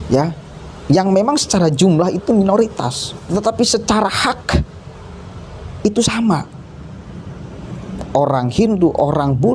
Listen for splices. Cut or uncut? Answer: cut